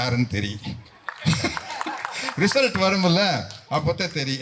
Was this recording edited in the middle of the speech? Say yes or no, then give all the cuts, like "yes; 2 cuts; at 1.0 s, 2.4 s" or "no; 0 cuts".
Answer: no; 0 cuts